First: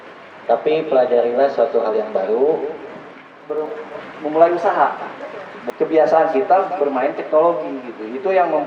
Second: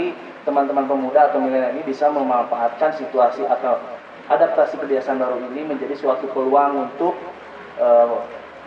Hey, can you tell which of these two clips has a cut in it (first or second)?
first